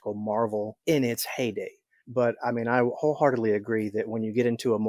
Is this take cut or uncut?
uncut